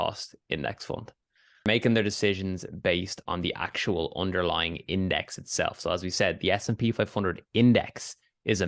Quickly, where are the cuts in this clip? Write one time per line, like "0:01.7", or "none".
0:01.6